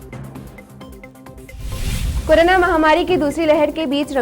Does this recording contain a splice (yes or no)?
yes